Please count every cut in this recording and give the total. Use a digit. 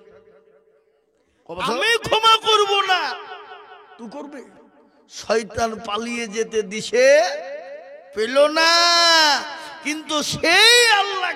1